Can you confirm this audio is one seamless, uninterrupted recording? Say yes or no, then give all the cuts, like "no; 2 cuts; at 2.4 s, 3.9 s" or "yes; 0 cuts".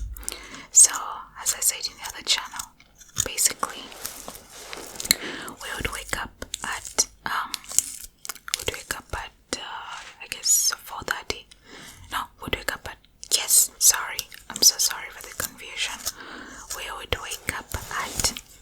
yes; 0 cuts